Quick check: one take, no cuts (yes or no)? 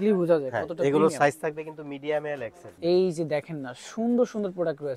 no